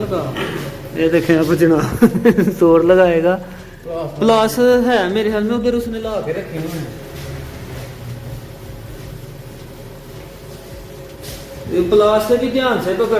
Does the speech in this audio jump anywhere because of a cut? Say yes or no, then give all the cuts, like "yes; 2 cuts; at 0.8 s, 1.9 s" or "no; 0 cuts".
no; 0 cuts